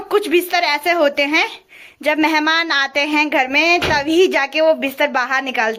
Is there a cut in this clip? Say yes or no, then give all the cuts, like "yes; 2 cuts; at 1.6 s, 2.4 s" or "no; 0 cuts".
no; 0 cuts